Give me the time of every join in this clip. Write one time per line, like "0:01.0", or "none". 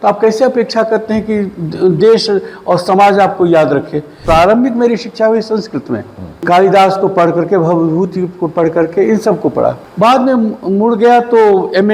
0:04.1